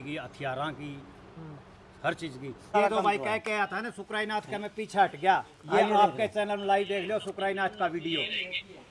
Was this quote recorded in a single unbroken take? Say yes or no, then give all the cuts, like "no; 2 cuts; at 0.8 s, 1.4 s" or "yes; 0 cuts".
no; 1 cut; at 2.6 s